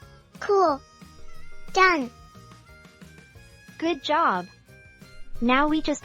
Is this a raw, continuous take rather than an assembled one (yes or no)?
no